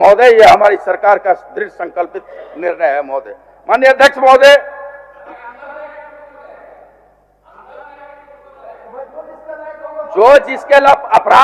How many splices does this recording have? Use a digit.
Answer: 0